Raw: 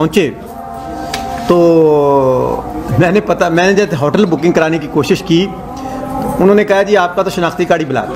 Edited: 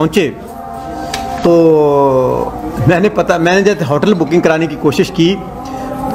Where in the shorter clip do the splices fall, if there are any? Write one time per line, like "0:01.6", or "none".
0:01.4